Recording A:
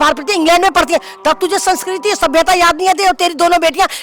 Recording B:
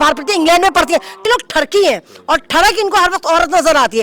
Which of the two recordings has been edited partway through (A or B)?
B